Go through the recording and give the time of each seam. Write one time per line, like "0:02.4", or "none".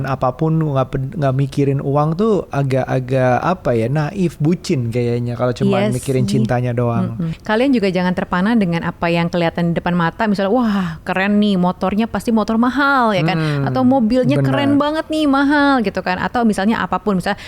0:07.4